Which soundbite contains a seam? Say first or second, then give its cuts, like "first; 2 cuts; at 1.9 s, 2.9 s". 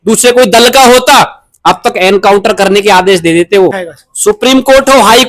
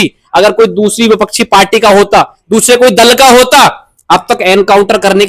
first; 1 cut; at 3.9 s